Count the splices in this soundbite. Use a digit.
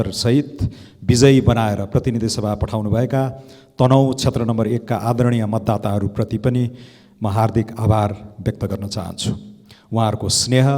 0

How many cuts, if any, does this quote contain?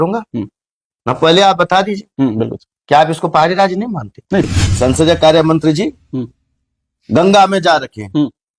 1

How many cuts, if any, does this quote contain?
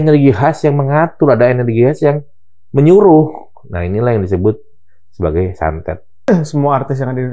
1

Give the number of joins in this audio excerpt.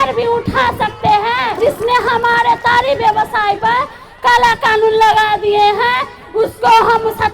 1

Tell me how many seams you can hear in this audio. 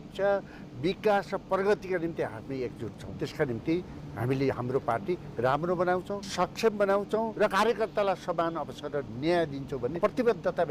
4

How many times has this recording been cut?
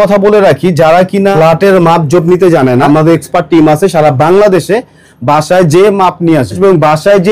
3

